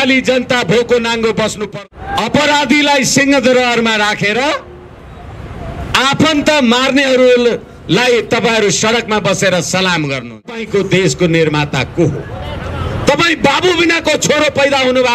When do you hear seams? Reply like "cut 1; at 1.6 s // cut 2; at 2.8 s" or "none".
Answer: cut 1; at 1.6 s // cut 2; at 10.6 s